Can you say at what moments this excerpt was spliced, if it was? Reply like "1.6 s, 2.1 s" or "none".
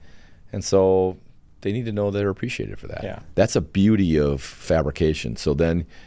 3.2 s, 4.6 s